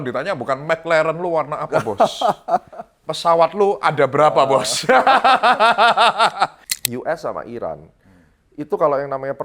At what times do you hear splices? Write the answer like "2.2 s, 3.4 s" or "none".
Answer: 6.6 s